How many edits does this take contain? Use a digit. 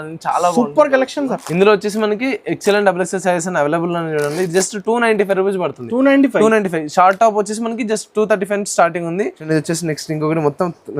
2